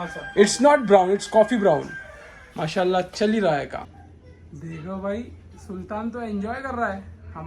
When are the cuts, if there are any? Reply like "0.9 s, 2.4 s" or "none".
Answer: 4.1 s